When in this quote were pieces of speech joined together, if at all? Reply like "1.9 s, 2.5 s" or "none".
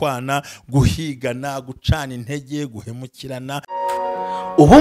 3.7 s